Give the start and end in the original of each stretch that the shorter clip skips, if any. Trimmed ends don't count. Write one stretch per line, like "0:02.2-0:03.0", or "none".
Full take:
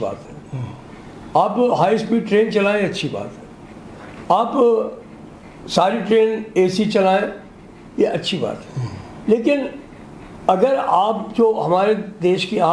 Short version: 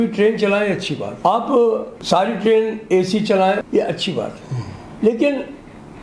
0:03.2-0:04.1
0:05.0-0:05.6
0:07.3-0:07.9

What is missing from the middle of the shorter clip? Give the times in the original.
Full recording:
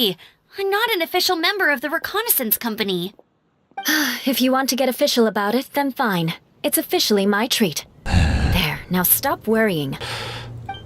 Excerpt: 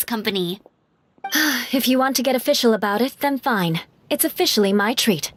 none

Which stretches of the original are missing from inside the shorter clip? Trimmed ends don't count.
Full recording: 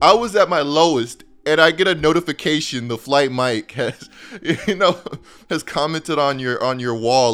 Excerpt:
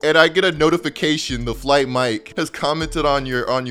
0:03.7-0:05.4

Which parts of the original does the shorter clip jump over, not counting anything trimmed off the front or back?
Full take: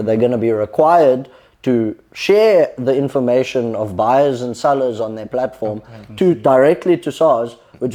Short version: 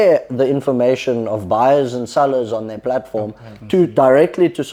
none

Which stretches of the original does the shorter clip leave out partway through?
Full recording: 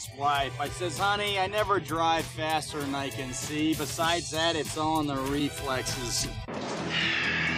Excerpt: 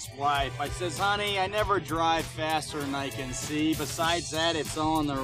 none

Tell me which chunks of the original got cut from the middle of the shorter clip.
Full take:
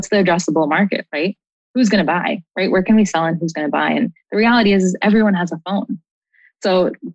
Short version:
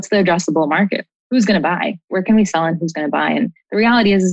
0:01.1-0:01.5
0:02.6-0:02.7

